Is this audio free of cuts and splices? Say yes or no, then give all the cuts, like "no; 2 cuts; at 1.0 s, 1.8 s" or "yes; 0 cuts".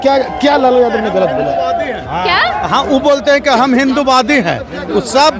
yes; 0 cuts